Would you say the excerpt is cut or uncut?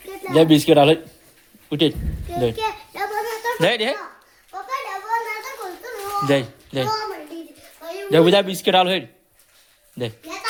uncut